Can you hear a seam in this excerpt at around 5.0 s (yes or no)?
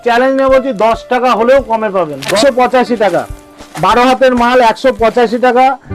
no